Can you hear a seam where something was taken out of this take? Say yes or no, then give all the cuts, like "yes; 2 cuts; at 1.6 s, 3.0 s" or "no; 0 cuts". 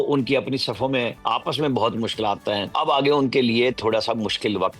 yes; 2 cuts; at 1.2 s, 2.7 s